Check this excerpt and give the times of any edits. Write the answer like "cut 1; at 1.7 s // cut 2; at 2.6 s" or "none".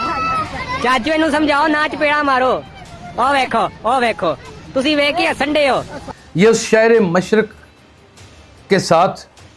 cut 1; at 6.2 s